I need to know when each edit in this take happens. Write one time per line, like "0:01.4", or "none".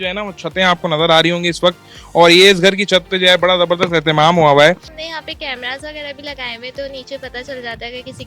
0:04.9